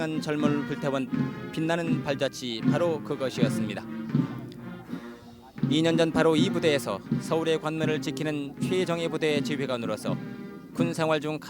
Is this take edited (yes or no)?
no